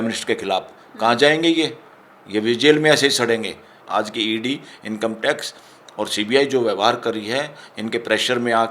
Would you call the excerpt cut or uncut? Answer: cut